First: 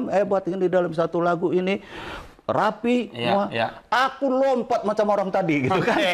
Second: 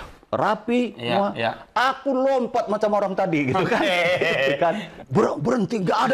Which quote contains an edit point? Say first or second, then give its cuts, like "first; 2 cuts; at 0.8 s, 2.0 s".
second; 1 cut; at 4.9 s